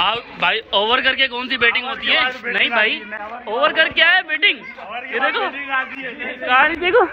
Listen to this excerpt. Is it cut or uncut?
uncut